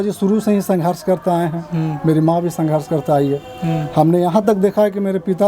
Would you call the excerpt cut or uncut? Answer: uncut